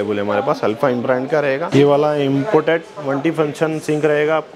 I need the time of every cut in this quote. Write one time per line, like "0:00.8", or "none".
0:01.6